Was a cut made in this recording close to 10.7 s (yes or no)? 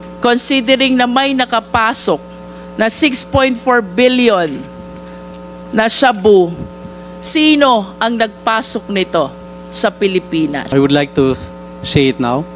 yes